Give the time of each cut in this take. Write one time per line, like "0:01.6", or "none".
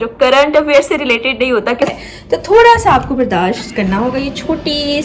0:01.9